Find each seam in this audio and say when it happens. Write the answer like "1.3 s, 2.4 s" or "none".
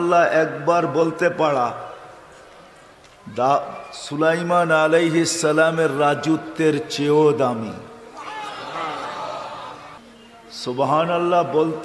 10.0 s